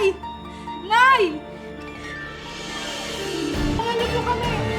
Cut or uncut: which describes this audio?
cut